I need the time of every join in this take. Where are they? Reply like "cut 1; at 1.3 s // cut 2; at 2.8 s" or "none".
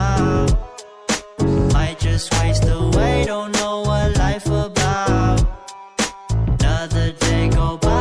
none